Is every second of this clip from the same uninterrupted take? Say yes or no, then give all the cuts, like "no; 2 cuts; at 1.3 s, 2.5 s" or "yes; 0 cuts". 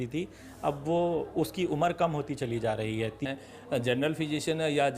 no; 1 cut; at 3.2 s